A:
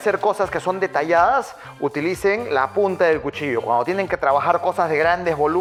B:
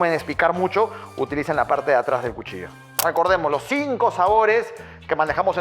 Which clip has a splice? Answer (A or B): B